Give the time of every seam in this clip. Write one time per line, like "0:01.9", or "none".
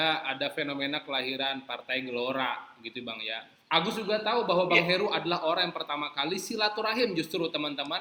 none

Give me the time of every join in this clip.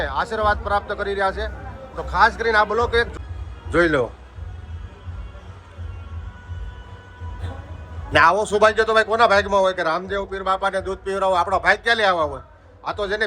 0:03.1

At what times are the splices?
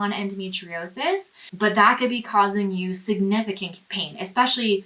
0:01.4

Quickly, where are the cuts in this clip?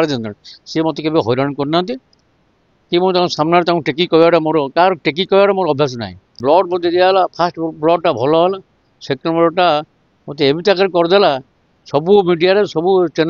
0:06.4

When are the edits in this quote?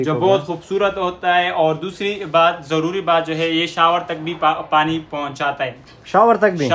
none

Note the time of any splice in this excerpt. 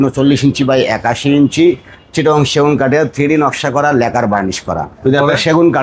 0:04.9

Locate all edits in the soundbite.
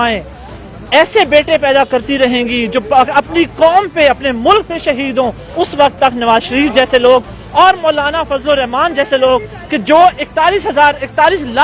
none

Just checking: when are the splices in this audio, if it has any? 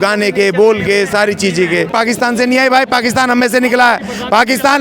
0:01.9

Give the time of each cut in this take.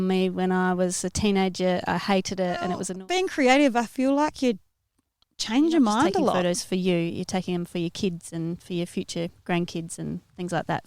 0:02.9
0:06.4

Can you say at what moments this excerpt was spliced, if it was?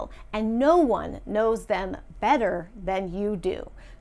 none

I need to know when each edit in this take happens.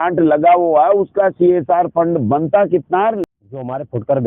0:03.2

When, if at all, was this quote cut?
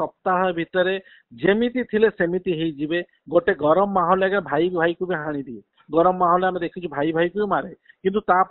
none

